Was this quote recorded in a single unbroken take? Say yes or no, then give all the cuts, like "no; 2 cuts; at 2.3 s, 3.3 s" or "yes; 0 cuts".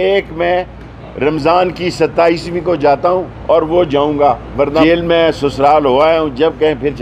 no; 1 cut; at 4.8 s